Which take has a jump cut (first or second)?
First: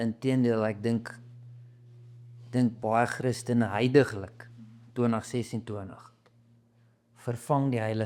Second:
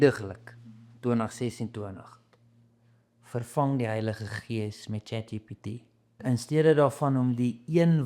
second